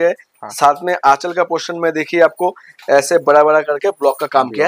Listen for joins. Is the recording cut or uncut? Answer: uncut